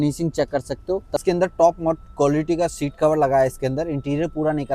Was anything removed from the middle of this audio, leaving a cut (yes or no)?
yes